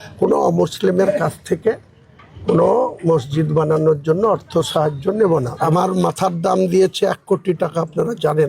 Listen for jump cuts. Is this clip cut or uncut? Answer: cut